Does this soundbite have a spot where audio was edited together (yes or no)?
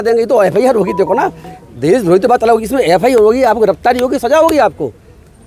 no